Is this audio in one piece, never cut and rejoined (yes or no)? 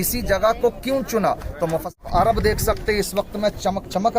no